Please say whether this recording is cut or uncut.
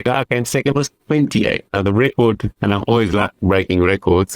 cut